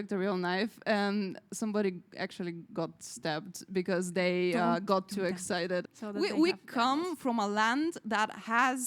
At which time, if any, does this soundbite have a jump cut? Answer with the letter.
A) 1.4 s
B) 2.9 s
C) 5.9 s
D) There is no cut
C